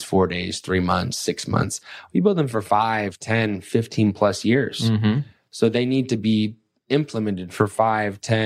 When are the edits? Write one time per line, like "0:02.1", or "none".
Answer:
none